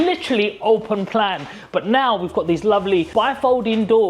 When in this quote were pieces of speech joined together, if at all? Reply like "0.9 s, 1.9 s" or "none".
3.1 s

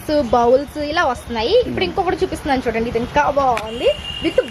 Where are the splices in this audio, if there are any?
none

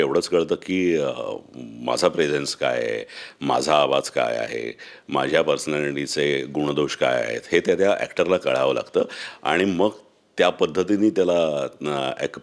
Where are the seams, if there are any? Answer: none

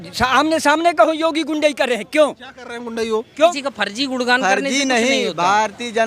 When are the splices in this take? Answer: 3.5 s

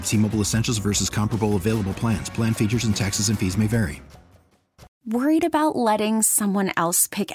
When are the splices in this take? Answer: 4.9 s

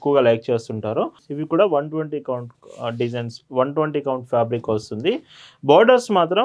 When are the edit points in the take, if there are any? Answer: 1.2 s

